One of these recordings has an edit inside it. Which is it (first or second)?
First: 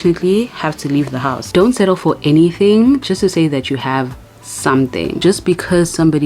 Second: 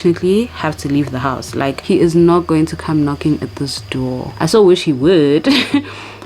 first